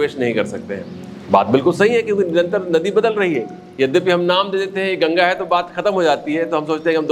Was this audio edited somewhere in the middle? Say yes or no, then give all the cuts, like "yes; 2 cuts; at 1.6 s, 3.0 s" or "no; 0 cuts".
no; 0 cuts